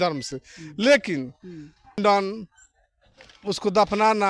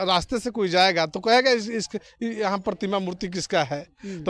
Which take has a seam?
first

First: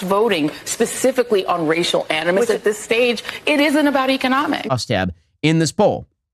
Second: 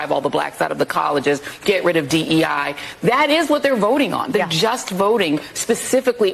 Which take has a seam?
first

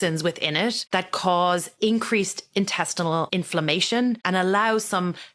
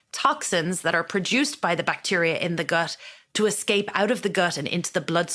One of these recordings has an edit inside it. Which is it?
first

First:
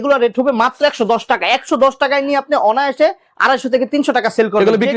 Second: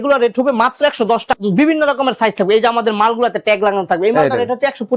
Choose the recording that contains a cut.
second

